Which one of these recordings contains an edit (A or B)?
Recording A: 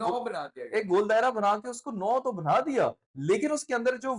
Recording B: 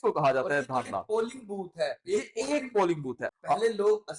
B